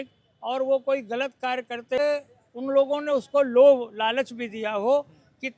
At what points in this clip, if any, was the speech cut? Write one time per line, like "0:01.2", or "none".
0:02.0